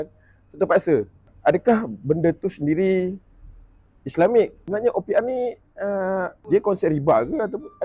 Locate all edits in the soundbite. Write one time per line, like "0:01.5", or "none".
0:01.2
0:04.6
0:06.4

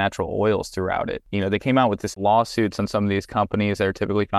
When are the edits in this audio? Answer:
0:01.2
0:02.1

